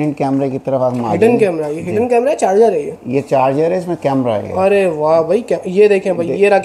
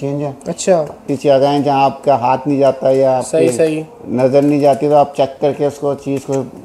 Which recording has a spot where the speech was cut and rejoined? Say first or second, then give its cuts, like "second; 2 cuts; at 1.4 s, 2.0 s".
second; 1 cut; at 1.1 s